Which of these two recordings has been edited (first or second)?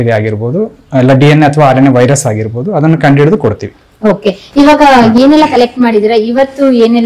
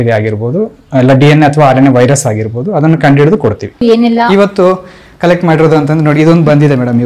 second